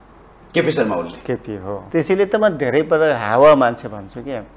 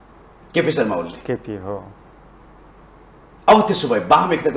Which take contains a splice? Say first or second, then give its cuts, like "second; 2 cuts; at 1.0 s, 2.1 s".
first; 1 cut; at 1.7 s